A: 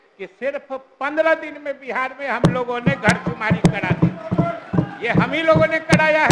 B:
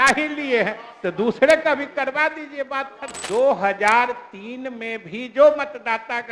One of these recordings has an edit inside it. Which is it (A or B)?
B